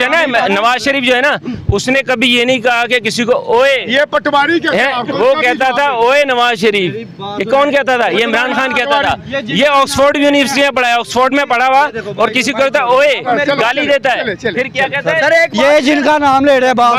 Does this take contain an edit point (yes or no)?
no